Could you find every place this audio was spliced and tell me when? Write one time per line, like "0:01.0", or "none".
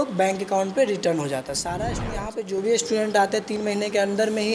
0:01.8